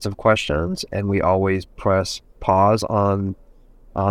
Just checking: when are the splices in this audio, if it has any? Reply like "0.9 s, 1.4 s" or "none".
none